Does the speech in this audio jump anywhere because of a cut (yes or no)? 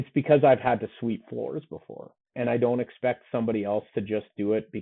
yes